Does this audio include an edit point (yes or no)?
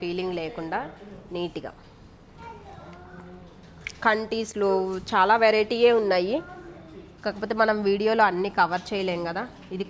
no